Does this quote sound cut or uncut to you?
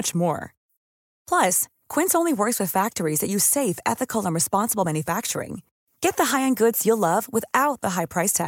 uncut